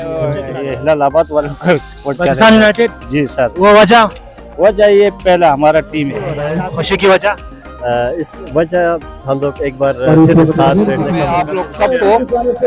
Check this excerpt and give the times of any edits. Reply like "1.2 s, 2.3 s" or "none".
6.5 s, 11.4 s